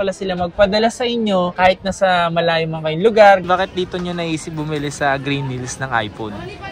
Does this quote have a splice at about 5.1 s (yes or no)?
no